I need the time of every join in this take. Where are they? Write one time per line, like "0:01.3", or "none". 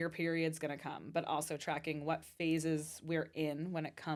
none